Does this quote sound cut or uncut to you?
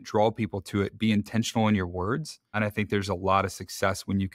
uncut